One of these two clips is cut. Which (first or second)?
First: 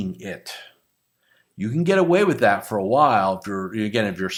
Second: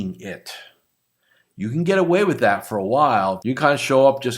second